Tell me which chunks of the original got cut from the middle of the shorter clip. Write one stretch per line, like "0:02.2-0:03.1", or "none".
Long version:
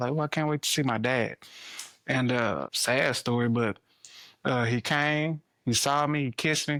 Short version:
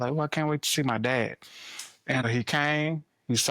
0:02.2-0:04.6

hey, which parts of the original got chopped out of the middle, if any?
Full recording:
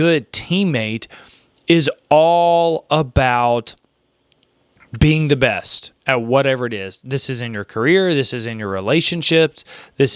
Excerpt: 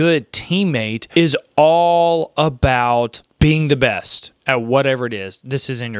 0:01.0-0:01.5
0:03.8-0:04.8

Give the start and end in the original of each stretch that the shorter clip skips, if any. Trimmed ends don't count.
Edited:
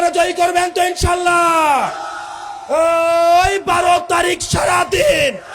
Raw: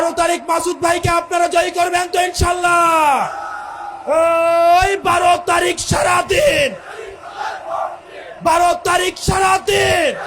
none

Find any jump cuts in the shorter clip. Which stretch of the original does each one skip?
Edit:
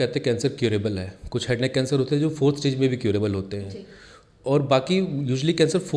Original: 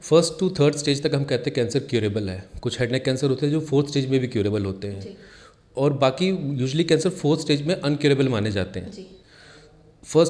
none

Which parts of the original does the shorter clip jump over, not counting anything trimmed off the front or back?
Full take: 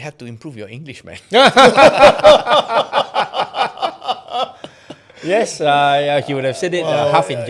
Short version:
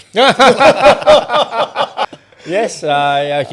0:03.3-0:04.9

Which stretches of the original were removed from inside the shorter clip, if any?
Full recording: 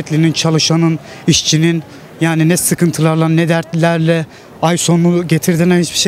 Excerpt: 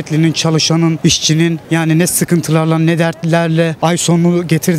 0:01.3-0:01.8
0:04.2-0:04.5

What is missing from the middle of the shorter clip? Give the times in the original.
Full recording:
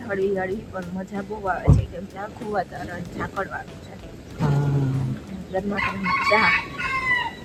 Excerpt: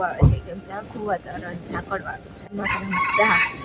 0:04.0-0:05.7

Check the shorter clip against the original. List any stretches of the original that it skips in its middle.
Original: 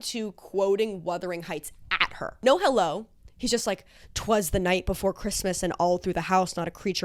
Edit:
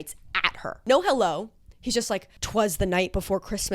0:03.9-0:04.1

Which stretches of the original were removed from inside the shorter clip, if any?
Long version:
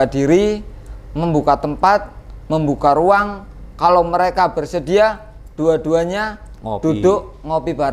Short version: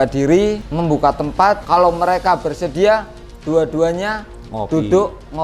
0:01.2-0:03.3

